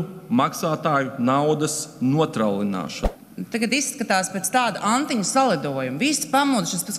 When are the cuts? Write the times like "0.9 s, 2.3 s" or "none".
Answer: 3.0 s